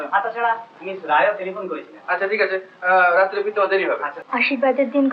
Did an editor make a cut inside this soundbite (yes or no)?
yes